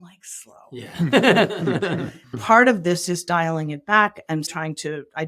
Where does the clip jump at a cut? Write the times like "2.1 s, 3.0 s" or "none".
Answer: 2.3 s, 4.5 s